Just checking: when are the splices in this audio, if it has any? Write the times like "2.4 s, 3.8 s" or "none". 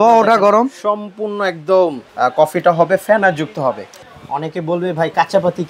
2.0 s, 4.0 s